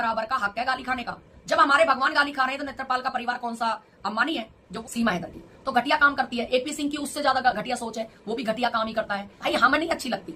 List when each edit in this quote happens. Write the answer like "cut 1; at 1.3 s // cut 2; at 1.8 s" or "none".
cut 1; at 4.6 s // cut 2; at 9.3 s

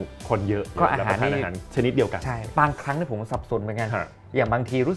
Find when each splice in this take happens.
cut 1; at 0.8 s // cut 2; at 1.6 s // cut 3; at 2.4 s

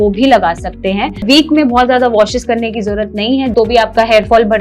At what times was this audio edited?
cut 1; at 1.2 s // cut 2; at 3.5 s

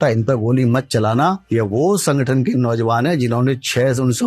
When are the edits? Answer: cut 1; at 1.4 s

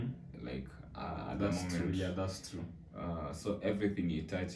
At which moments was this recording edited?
none

